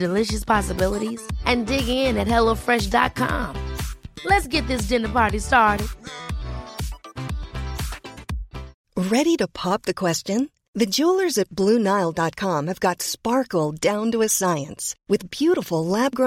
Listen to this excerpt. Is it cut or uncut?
cut